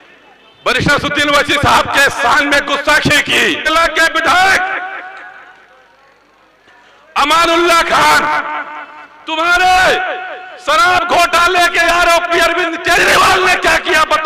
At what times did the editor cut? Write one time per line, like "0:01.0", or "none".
0:03.7